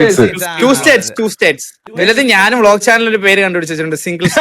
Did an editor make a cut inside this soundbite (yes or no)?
yes